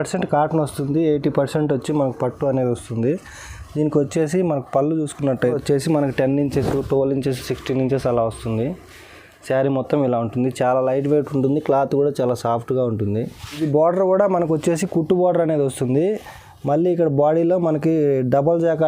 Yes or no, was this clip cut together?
yes